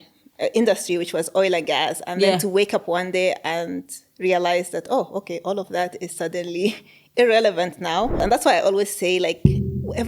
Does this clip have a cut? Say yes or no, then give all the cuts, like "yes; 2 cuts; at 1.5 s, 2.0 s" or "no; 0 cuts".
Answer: yes; 1 cut; at 8.2 s